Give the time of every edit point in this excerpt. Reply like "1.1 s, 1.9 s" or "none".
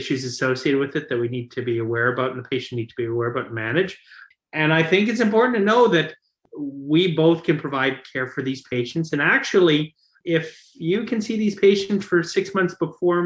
4.2 s, 6.4 s, 10.2 s